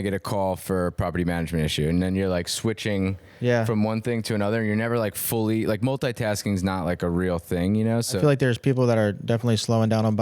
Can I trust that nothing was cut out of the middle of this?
no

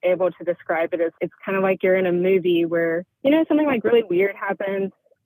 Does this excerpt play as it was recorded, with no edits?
yes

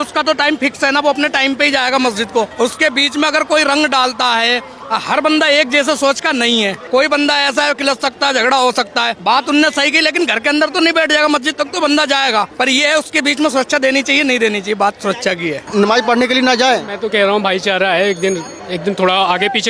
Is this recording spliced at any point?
yes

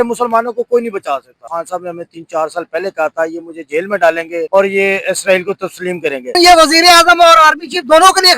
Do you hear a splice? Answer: yes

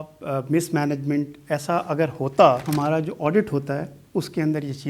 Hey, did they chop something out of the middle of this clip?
yes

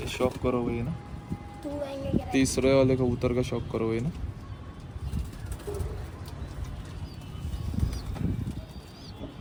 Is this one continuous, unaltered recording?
yes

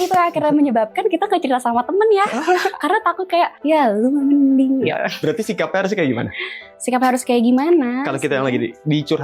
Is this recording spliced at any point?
no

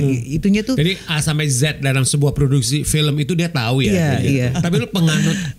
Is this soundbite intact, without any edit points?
no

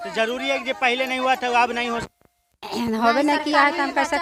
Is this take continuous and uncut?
yes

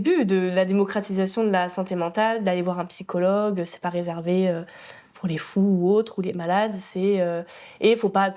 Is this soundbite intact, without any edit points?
yes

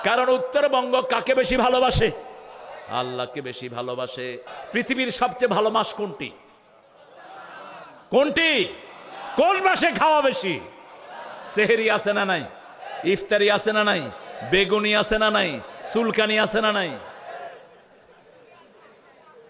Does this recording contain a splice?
yes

